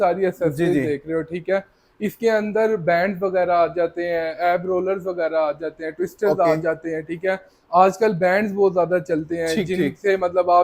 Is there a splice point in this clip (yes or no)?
no